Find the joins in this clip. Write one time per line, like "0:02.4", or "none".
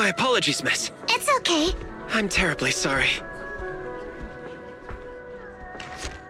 none